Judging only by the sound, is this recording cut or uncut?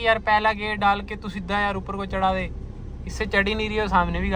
uncut